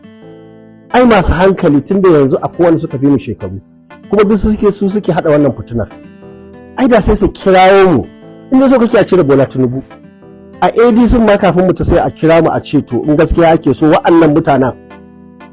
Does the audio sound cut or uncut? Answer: uncut